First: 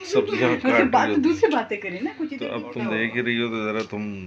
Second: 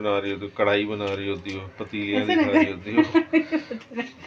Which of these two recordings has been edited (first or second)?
first